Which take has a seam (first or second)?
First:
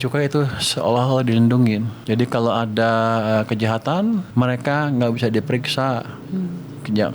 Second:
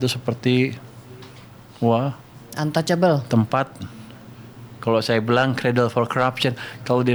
first